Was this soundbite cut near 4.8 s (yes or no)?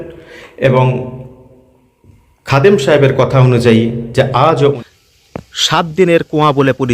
yes